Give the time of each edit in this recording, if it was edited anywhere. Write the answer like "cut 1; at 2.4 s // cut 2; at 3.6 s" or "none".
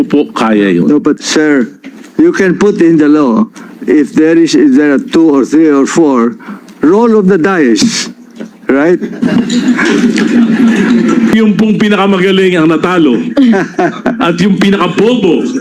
cut 1; at 1.2 s // cut 2; at 11.3 s